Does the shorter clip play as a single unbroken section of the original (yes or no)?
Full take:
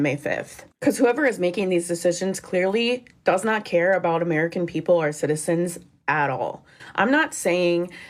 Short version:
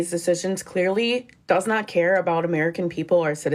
yes